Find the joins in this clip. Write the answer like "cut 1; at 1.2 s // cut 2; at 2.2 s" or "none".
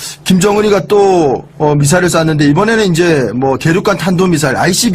cut 1; at 2.9 s